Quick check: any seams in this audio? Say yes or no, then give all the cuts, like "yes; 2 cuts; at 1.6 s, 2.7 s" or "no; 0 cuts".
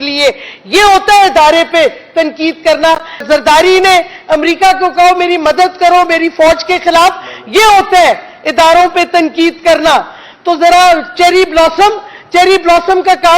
yes; 1 cut; at 3.2 s